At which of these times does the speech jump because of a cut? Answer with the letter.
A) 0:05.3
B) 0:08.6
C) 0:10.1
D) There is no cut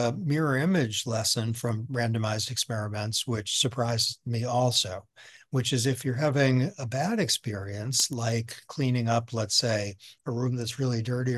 D